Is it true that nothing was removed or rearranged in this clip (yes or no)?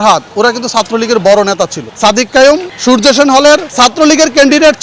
no